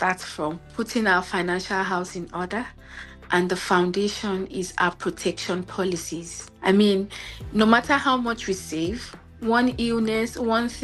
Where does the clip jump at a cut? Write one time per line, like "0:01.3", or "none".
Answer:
none

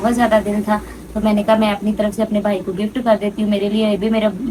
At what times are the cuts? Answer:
none

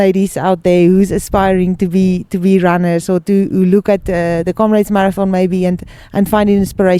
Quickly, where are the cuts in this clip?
none

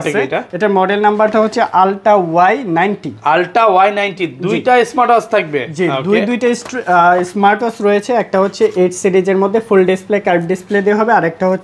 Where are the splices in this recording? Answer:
none

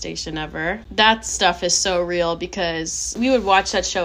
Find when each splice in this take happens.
0:00.9
0:03.2

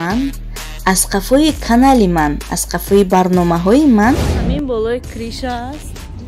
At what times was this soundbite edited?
0:04.4

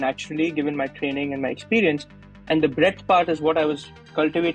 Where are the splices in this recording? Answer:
none

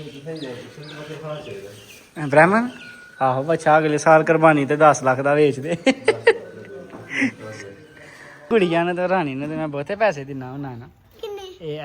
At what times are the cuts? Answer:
0:08.5

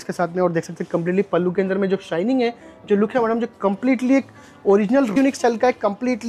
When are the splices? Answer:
0:05.2

